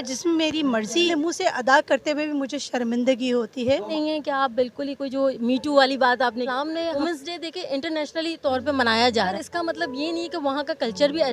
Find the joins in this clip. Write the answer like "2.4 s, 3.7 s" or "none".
1.1 s, 3.9 s, 7.0 s, 9.3 s